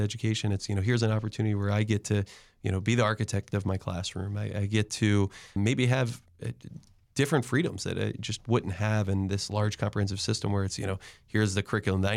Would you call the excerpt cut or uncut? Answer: uncut